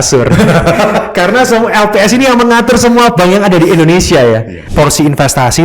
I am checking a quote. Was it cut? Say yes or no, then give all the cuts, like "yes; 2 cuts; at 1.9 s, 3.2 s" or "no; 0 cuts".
yes; 1 cut; at 4.6 s